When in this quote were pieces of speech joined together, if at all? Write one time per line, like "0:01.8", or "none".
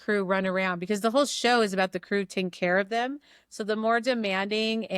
none